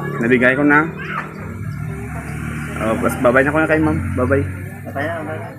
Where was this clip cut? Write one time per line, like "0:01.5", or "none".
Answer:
none